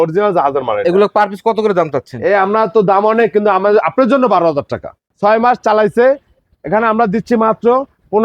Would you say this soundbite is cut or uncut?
cut